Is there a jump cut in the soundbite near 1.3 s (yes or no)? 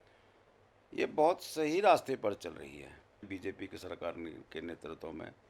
no